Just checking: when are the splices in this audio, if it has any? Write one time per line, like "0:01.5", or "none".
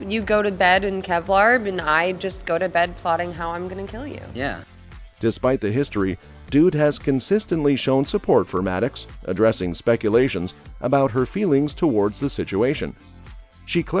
none